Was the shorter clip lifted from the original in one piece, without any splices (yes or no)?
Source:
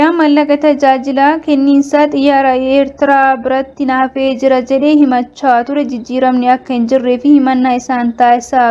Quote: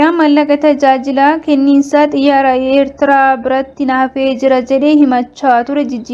yes